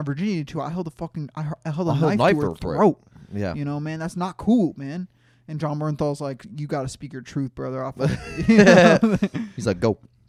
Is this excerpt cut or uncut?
uncut